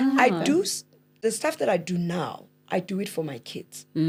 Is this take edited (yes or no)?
no